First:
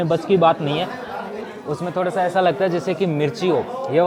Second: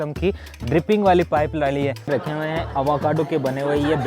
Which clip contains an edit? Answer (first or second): second